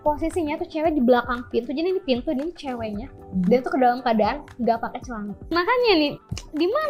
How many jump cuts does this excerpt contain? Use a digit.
1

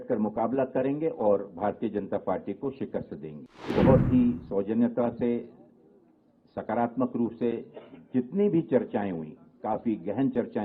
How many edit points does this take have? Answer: 1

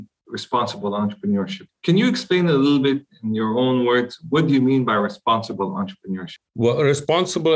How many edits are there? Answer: 2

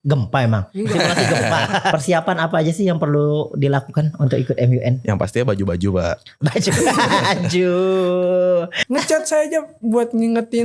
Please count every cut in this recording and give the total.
2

